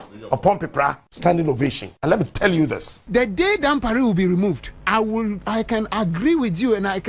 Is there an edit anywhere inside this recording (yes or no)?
yes